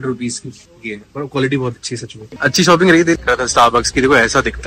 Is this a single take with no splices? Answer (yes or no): no